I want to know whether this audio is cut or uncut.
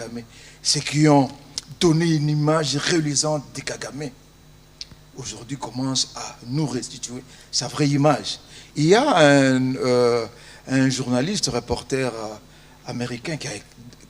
uncut